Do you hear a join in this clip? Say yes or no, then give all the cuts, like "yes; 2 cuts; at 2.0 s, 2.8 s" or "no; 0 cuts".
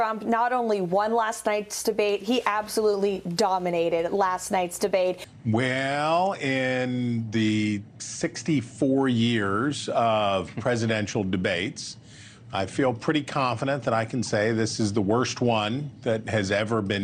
yes; 1 cut; at 5.3 s